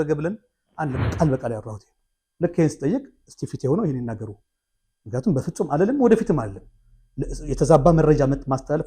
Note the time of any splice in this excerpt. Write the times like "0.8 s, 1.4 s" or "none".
1.0 s